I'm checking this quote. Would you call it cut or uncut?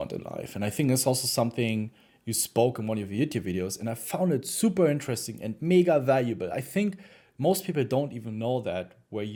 uncut